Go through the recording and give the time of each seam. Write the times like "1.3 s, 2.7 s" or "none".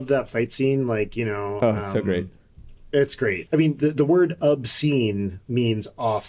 3.4 s